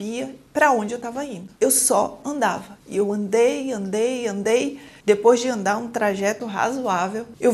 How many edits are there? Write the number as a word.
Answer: zero